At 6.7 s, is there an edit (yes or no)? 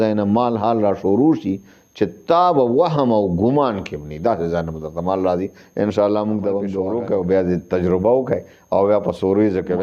yes